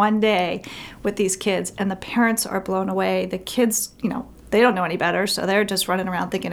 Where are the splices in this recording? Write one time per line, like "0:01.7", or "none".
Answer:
none